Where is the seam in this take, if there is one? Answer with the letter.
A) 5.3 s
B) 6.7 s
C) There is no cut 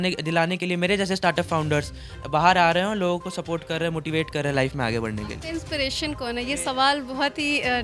C